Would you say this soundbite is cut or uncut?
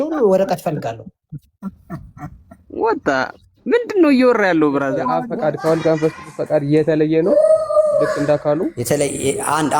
cut